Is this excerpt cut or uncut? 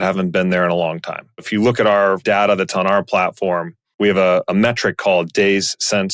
uncut